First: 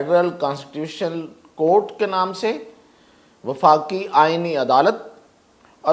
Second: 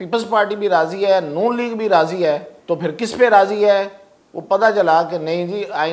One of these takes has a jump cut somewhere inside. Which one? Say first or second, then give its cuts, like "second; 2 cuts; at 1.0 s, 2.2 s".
second; 1 cut; at 2.5 s